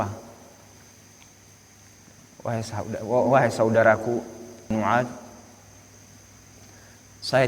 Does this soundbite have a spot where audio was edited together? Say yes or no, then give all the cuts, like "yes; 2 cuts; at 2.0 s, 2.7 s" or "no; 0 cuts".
yes; 1 cut; at 4.7 s